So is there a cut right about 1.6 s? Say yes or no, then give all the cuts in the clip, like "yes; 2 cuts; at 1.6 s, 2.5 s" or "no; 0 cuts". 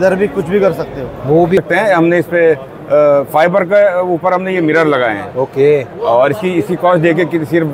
yes; 1 cut; at 1.6 s